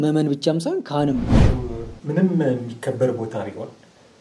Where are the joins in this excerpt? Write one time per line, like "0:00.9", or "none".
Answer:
0:01.4